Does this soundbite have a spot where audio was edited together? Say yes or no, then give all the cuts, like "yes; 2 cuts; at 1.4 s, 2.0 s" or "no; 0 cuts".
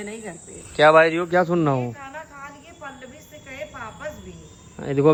no; 0 cuts